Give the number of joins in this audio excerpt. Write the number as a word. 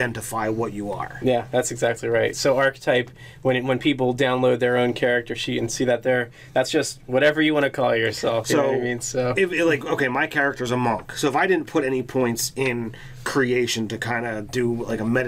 one